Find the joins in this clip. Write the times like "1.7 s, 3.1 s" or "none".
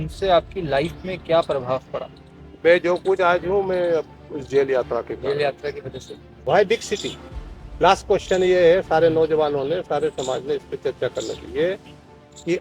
6.4 s